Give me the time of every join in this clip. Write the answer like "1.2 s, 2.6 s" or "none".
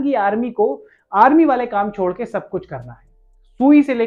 none